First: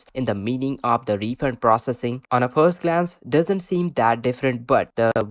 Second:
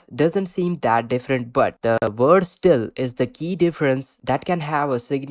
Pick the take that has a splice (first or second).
first